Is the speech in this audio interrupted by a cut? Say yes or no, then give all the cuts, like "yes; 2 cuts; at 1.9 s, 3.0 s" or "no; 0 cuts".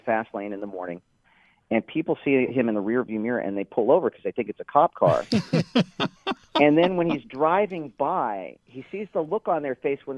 no; 0 cuts